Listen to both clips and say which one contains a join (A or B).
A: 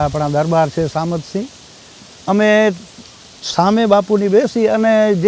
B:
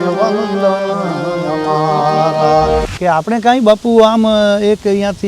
B